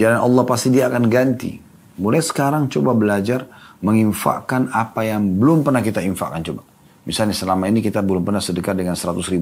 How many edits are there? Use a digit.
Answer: 1